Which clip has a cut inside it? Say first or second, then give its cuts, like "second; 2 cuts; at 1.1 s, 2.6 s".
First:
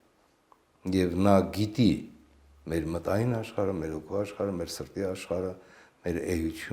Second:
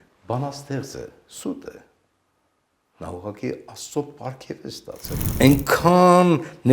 second; 1 cut; at 5.2 s